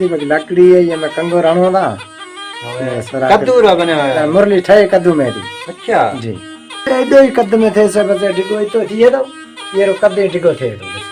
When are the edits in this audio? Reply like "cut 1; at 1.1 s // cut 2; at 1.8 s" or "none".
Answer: cut 1; at 6.8 s